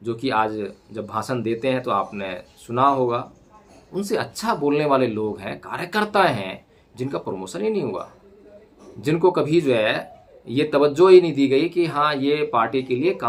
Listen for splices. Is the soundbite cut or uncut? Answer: uncut